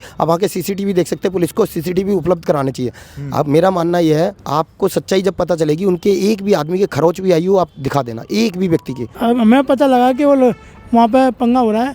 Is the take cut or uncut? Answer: cut